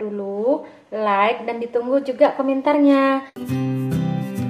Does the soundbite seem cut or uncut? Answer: cut